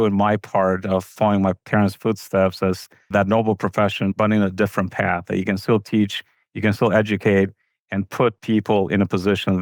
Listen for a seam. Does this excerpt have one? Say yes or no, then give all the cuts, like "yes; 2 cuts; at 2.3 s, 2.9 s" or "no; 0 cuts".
no; 0 cuts